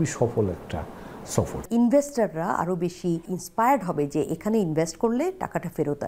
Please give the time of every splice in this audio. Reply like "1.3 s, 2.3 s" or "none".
1.6 s, 3.4 s